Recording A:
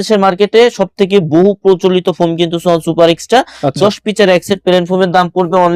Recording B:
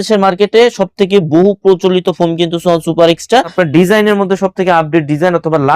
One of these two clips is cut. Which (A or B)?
B